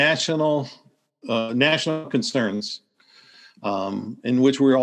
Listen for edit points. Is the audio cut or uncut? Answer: uncut